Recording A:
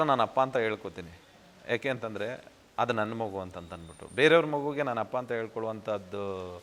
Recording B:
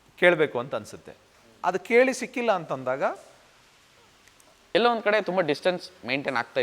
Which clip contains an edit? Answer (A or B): B